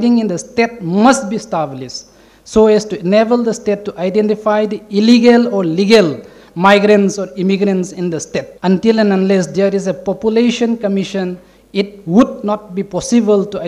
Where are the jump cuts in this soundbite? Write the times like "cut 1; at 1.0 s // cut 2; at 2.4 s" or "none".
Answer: cut 1; at 8.5 s